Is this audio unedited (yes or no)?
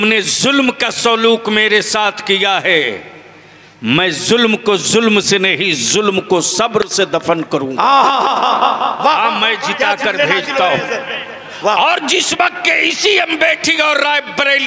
yes